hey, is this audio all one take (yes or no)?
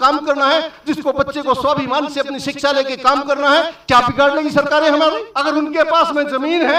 no